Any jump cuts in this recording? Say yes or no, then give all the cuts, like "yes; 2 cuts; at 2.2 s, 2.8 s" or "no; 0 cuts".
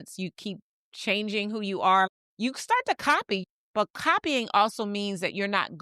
yes; 2 cuts; at 2.1 s, 3.4 s